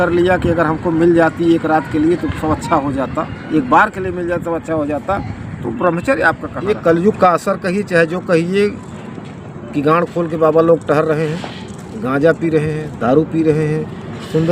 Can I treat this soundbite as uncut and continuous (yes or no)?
no